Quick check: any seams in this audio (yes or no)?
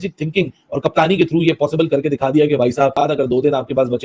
yes